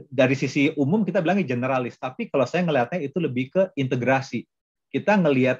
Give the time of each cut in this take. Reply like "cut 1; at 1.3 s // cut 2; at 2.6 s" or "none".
none